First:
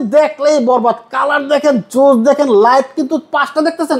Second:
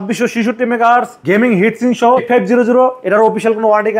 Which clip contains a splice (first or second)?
second